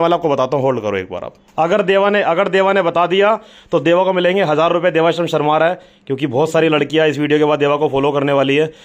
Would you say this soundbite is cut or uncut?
uncut